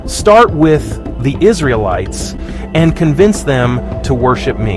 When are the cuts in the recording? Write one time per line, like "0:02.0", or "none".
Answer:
none